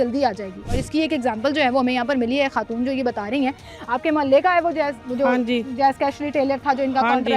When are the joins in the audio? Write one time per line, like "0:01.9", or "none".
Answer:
none

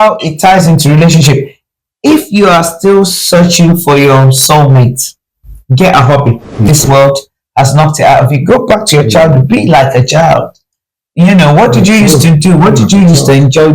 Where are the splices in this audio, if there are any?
0:06.7

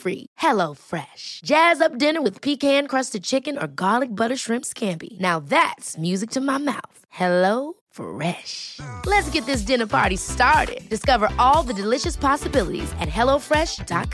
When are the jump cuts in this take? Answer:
none

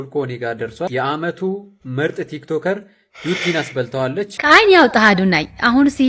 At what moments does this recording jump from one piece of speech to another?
0:00.9
0:04.3

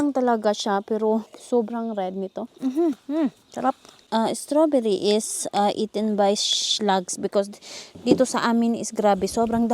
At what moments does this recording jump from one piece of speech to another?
0:01.4
0:02.5
0:03.9

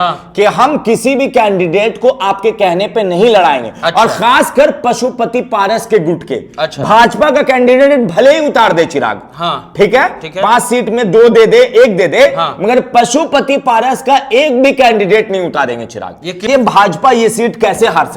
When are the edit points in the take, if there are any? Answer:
0:16.4

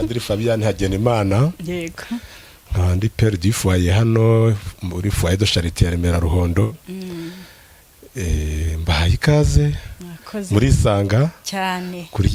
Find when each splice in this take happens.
none

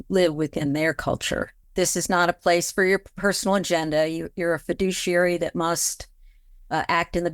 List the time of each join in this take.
0:01.6

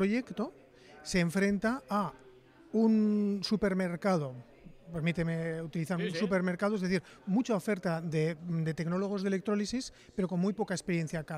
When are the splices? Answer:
none

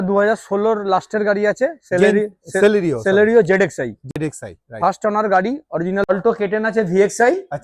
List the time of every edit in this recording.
0:06.1

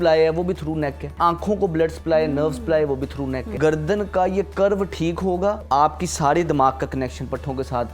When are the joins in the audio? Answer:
0:01.1
0:03.5
0:05.6

